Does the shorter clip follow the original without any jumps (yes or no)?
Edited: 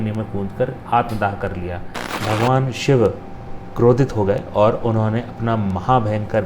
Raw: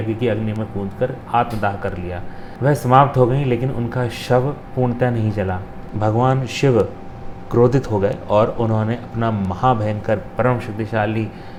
no